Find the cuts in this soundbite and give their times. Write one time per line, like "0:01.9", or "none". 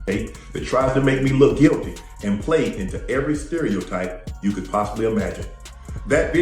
0:02.0